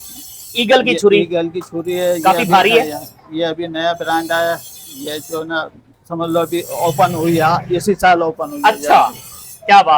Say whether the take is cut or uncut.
uncut